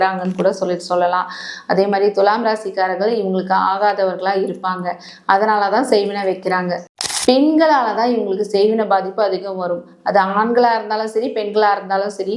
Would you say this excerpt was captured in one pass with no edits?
no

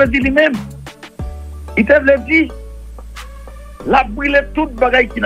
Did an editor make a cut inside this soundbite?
no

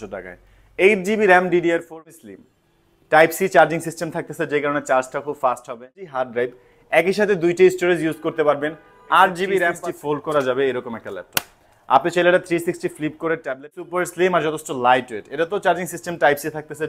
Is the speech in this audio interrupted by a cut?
yes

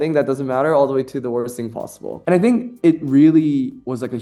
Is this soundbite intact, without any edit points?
yes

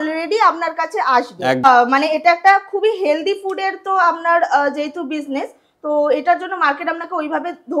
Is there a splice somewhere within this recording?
yes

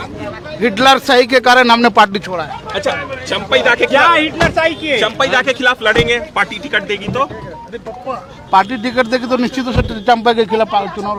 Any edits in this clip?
no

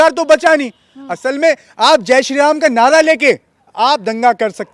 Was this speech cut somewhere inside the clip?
no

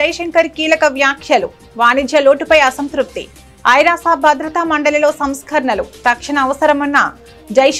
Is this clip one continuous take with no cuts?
yes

